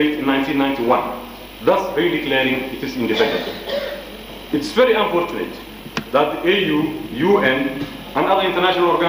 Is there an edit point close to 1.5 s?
no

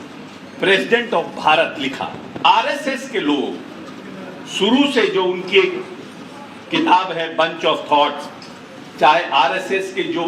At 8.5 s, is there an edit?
no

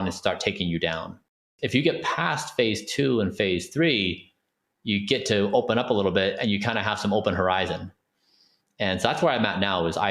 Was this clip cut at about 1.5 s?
yes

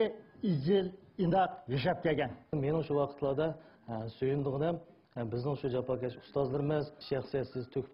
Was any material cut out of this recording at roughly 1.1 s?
no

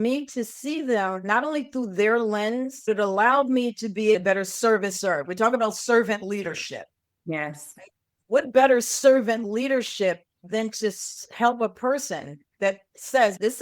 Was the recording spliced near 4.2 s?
yes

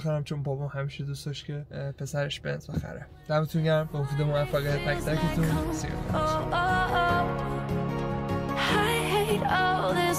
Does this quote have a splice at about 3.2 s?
no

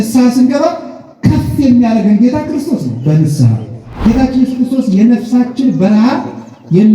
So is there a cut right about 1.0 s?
no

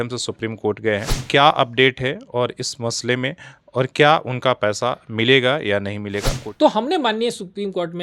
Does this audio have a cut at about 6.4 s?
yes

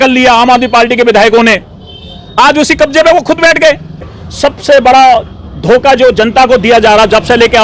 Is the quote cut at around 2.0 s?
no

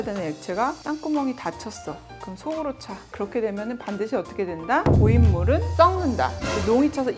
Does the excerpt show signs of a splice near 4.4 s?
no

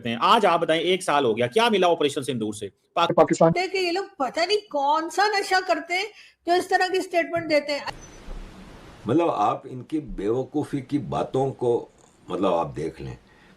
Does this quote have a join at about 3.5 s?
yes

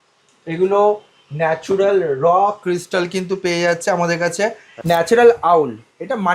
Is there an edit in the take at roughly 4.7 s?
yes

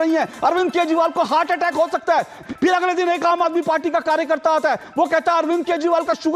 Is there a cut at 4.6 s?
no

